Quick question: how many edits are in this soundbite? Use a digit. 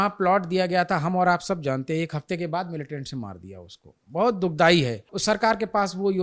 1